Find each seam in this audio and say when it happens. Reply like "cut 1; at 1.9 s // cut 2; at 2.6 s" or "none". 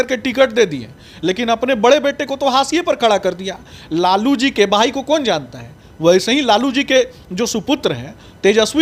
none